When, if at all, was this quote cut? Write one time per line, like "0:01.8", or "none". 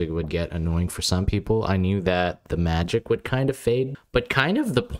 0:03.9